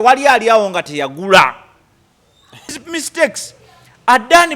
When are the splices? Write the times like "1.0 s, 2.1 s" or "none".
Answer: 2.7 s